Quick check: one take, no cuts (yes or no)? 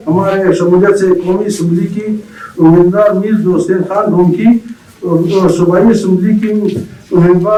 yes